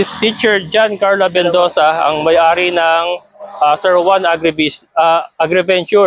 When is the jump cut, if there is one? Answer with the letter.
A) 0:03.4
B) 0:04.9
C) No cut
C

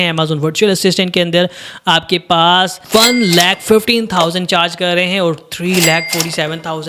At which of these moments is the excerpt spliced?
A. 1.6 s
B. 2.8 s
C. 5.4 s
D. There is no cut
D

